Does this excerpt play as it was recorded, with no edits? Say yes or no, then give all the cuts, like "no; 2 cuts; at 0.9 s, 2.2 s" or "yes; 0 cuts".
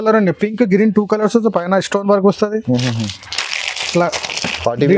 yes; 0 cuts